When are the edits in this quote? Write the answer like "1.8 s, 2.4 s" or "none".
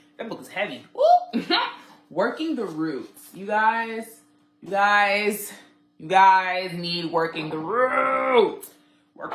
none